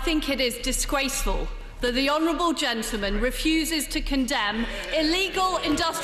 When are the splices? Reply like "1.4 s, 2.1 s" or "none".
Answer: none